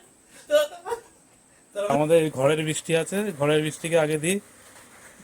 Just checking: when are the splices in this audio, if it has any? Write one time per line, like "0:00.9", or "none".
0:01.9